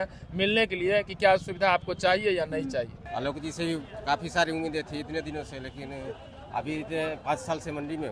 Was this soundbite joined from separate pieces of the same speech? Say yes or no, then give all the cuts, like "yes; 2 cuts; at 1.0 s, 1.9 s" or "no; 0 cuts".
yes; 1 cut; at 3.0 s